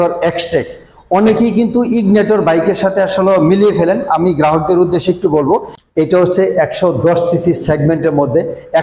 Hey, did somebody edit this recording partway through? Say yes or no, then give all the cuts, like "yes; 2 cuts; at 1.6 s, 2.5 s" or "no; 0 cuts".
yes; 1 cut; at 5.8 s